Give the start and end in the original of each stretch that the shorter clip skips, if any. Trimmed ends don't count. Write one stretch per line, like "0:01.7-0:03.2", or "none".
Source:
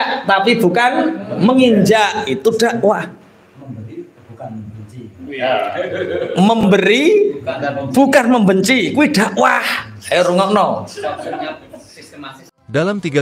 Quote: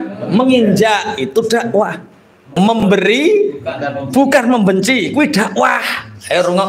0:03.6-0:06.3